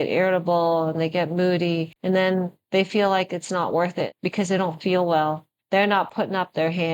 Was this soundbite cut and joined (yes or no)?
yes